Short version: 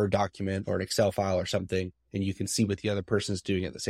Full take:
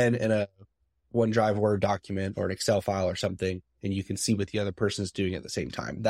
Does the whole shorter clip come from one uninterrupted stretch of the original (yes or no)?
yes